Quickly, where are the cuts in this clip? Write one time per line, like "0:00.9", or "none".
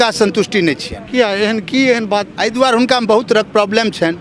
none

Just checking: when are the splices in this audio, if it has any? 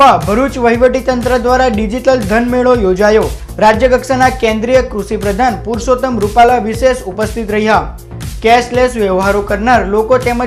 none

